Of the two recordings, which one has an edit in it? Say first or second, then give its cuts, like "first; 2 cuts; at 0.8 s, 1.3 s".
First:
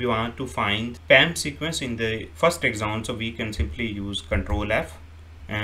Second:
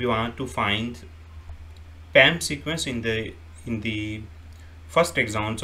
first; 2 cuts; at 1.0 s, 2.3 s